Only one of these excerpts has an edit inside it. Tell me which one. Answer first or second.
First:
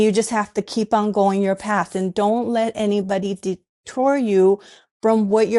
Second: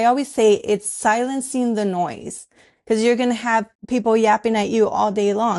second